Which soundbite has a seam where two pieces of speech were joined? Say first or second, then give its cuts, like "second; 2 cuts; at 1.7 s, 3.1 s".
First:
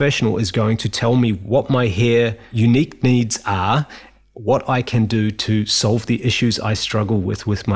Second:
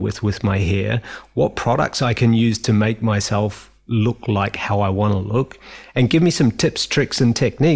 first; 2 cuts; at 1.4 s, 2.4 s